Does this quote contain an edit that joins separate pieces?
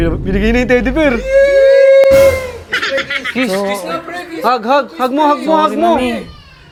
no; 0 cuts

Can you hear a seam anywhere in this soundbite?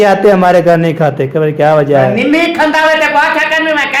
no; 0 cuts

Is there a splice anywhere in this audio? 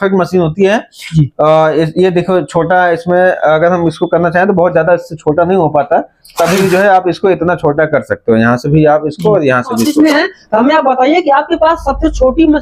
yes; 1 cut; at 9.8 s

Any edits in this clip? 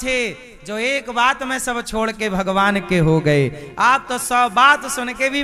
no; 0 cuts

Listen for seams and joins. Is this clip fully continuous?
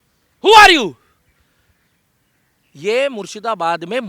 yes; 0 cuts

